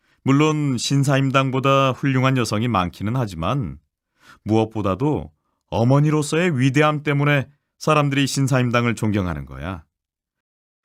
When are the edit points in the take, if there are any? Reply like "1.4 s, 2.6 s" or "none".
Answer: none

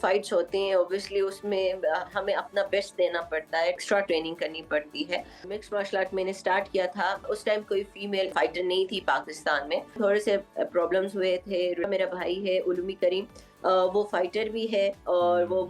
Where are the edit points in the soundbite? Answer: 3.8 s, 5.4 s, 7.2 s, 8.3 s, 10.0 s, 11.9 s

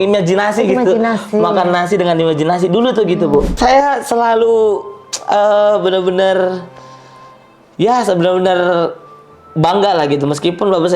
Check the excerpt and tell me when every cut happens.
3.5 s

